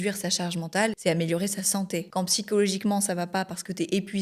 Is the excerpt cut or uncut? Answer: cut